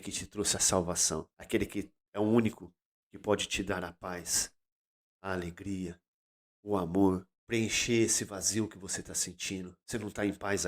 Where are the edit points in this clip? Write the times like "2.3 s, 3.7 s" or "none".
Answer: 1.3 s, 7.3 s, 9.8 s